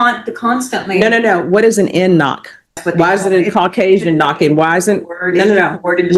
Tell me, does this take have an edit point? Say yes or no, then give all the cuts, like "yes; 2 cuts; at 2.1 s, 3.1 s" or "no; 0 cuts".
yes; 1 cut; at 2.8 s